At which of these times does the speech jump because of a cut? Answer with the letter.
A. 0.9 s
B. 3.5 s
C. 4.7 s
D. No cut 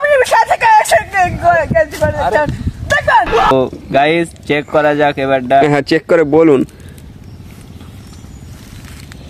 B